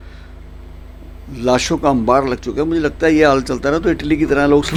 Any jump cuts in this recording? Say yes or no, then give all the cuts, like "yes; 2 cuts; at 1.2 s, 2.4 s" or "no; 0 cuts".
no; 0 cuts